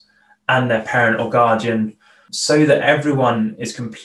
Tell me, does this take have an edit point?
yes; 1 cut; at 2.3 s

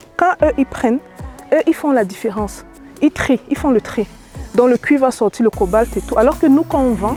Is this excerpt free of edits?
yes; 0 cuts

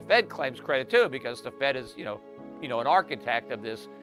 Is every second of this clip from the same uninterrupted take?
yes; 0 cuts

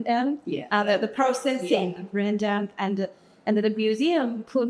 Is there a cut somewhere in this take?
no; 0 cuts

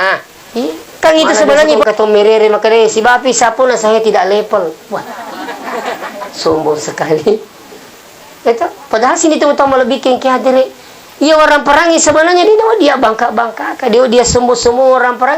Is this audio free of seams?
no; 1 cut; at 1.8 s

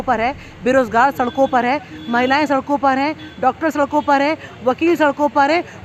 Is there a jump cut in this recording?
no; 0 cuts

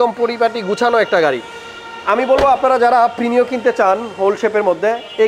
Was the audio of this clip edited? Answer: no; 0 cuts

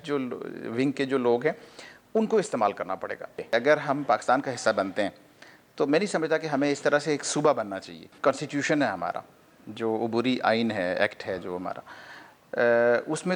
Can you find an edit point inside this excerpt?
yes; 2 cuts; at 3.4 s, 8.1 s

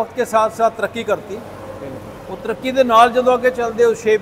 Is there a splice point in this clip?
no; 0 cuts

